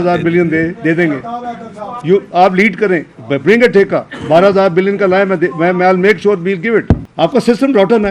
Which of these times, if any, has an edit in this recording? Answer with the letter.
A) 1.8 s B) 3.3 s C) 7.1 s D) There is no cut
C